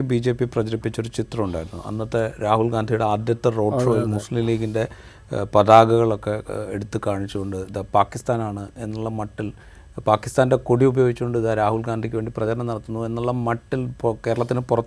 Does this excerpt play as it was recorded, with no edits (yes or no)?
yes